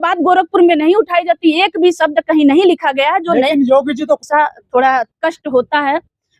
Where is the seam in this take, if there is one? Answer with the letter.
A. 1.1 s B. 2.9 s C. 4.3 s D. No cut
C